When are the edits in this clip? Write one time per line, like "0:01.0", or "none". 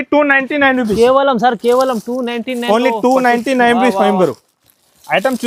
none